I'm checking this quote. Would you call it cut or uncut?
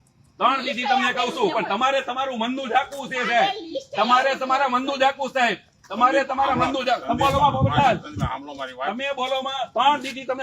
uncut